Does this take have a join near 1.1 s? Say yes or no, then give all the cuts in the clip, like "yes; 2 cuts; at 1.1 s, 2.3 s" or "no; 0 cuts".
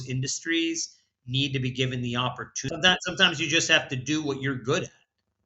no; 1 cut; at 2.6 s